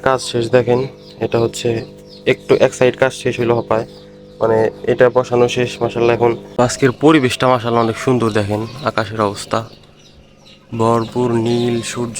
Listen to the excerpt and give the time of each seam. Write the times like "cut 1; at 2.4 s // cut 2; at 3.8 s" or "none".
cut 1; at 6.5 s